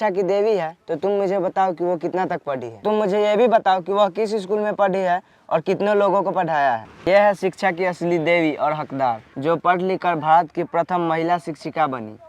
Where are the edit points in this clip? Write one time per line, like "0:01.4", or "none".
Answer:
0:06.9